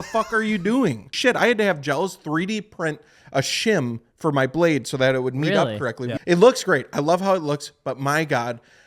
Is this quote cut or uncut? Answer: cut